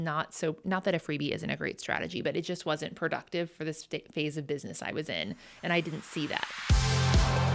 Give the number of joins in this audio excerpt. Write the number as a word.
one